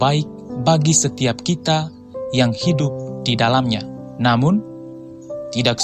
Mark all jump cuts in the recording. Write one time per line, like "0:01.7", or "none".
0:04.0